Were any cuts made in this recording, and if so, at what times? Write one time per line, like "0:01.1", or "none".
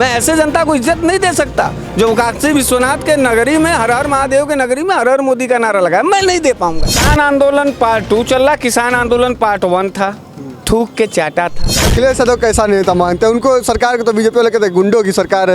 0:06.9
0:11.8